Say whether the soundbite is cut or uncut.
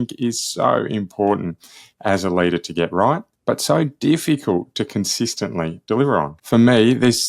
cut